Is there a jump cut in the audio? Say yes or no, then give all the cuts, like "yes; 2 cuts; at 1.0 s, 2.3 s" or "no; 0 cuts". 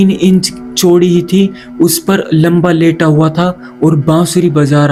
no; 0 cuts